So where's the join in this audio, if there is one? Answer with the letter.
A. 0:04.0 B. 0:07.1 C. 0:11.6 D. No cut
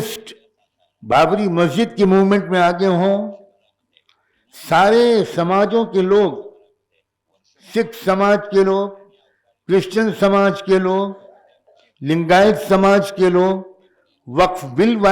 D